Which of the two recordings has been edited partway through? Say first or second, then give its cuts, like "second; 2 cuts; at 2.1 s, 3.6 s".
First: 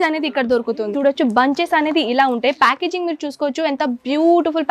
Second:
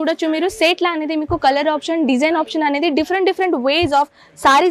first; 1 cut; at 0.9 s